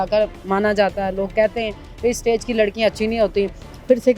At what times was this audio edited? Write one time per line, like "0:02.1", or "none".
none

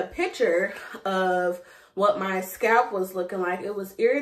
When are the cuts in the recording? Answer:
none

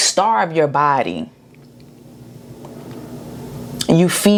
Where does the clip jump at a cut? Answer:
none

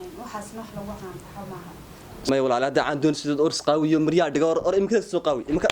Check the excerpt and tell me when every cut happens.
0:02.3

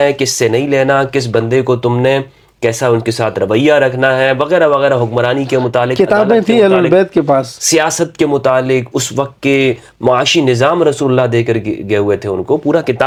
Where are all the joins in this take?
none

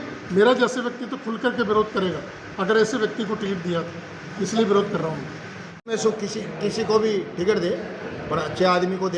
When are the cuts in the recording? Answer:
0:05.9

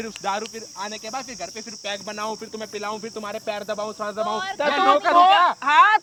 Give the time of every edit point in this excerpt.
none

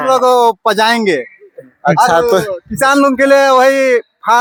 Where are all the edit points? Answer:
none

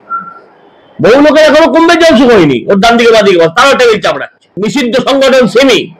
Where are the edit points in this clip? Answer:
0:04.6

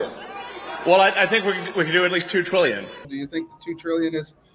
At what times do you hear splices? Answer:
0:03.0

